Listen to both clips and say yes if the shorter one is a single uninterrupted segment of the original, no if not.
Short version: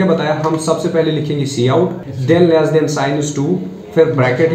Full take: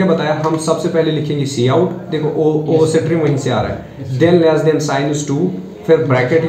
no